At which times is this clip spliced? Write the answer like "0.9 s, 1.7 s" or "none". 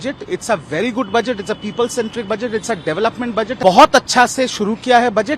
3.5 s